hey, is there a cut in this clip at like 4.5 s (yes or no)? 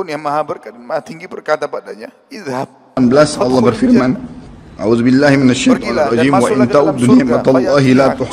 no